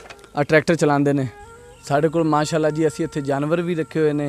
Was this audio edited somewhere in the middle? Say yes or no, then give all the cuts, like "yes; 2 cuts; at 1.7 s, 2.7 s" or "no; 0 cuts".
yes; 1 cut; at 1.4 s